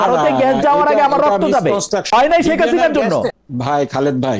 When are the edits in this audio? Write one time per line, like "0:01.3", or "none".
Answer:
0:02.1
0:03.3